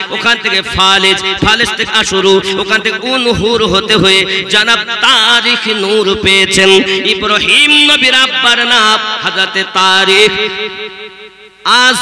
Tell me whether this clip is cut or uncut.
uncut